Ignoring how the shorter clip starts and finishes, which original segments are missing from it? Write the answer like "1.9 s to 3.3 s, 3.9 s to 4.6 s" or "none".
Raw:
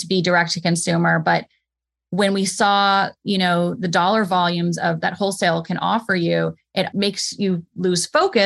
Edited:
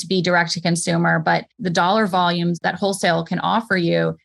1.6 s to 3.8 s, 4.8 s to 5.0 s